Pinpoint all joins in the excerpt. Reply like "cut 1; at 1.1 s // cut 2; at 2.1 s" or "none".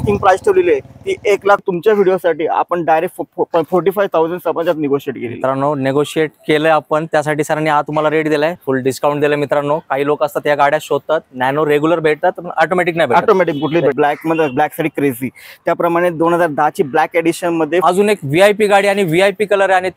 cut 1; at 1.6 s // cut 2; at 8.6 s // cut 3; at 13.9 s // cut 4; at 17.8 s